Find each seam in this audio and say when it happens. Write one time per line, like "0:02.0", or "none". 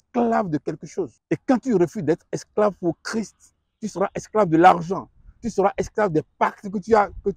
0:01.2